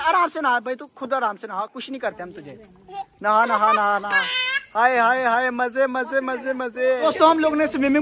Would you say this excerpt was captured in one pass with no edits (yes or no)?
yes